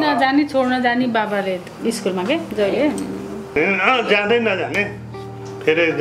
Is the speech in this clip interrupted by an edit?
yes; 1 cut; at 3.5 s

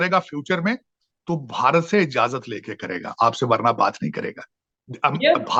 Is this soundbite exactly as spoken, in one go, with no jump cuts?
yes; 0 cuts

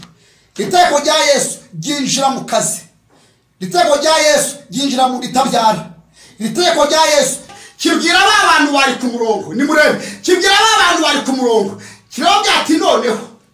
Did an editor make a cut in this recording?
yes; 1 cut; at 7.6 s

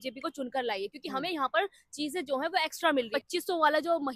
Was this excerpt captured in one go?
no; 1 cut; at 3.1 s

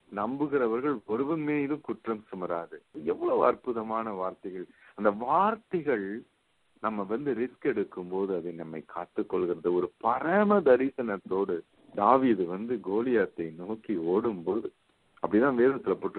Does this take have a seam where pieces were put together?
no; 0 cuts

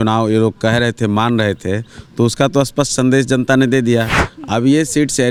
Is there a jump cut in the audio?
no; 0 cuts

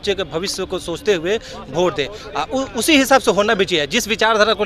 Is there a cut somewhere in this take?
no; 0 cuts

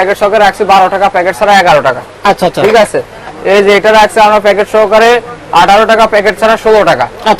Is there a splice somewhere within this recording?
no; 0 cuts

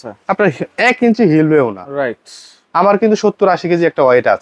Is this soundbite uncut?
yes; 0 cuts

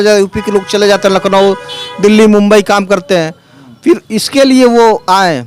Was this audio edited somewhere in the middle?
no; 0 cuts

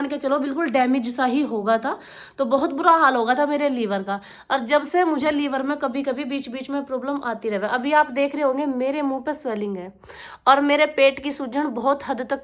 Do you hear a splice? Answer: no; 0 cuts

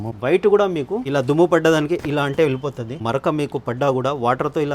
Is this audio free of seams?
no; 2 cuts; at 1.0 s, 3.0 s

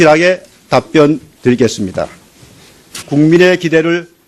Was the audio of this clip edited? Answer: no; 0 cuts

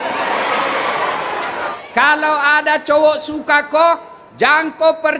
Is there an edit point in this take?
yes; 1 cut; at 1.5 s

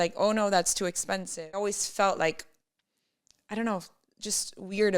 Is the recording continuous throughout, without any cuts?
no; 1 cut; at 1.6 s

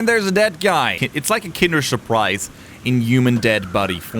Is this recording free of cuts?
no; 1 cut; at 1.0 s

